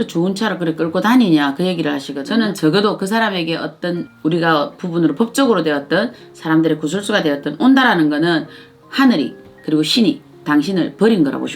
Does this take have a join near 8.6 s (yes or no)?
no